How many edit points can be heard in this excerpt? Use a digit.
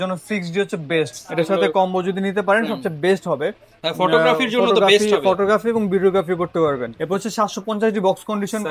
2